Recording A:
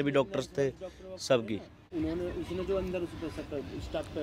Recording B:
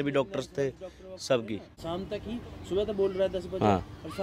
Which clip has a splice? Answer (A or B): B